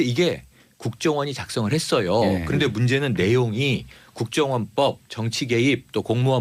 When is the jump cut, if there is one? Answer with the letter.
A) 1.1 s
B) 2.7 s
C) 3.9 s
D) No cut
D